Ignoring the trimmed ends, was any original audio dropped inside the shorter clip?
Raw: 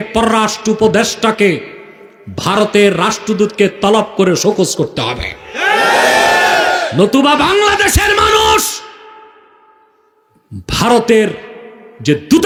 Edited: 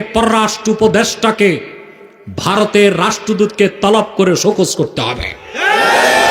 no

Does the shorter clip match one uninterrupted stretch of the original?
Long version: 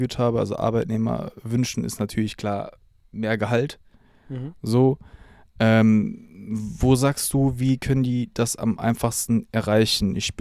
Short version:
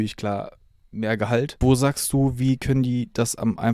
no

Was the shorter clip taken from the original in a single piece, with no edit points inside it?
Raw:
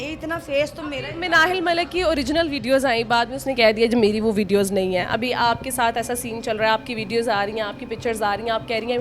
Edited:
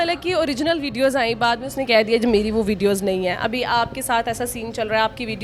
yes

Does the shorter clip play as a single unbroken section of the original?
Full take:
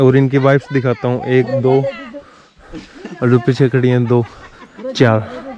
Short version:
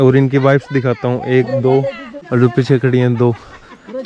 no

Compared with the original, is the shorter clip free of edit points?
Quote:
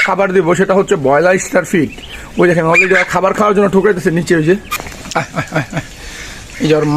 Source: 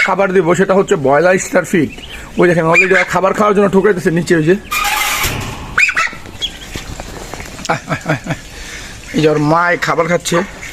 no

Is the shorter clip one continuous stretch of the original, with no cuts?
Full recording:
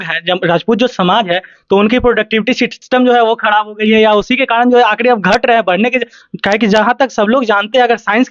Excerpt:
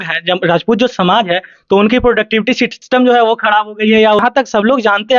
no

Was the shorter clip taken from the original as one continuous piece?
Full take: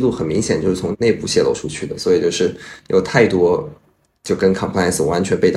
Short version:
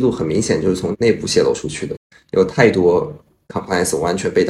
no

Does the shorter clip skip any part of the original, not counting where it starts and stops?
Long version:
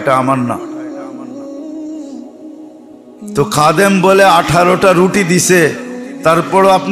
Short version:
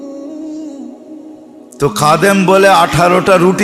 yes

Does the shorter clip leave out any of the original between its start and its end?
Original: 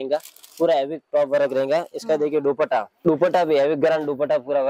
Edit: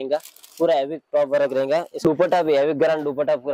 yes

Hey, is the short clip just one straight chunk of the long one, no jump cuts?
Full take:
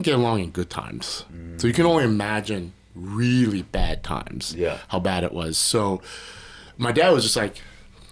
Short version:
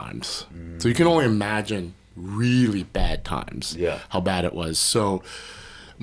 yes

